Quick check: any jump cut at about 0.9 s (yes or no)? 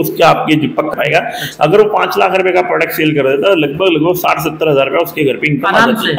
yes